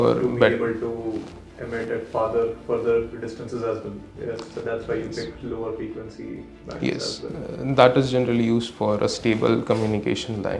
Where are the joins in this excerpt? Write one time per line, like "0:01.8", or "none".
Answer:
none